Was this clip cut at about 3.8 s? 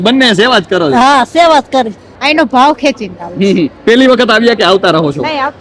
no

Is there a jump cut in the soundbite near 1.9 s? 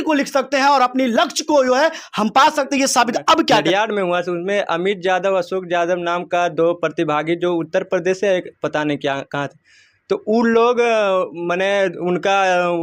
no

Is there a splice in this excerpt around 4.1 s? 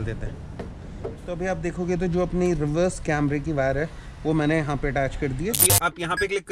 no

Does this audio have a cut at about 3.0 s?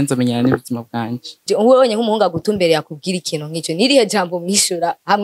no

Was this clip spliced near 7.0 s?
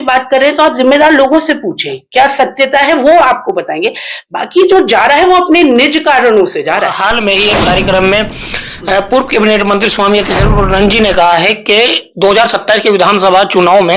yes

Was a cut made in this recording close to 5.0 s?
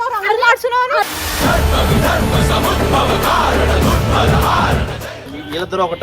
yes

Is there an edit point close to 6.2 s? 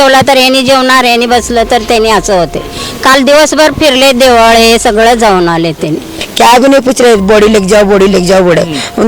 yes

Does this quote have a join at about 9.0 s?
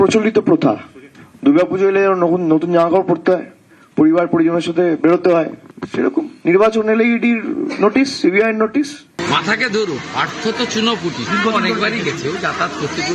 yes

